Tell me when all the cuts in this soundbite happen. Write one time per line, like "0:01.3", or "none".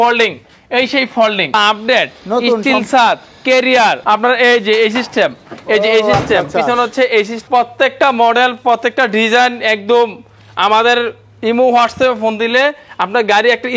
0:01.5
0:04.0
0:07.4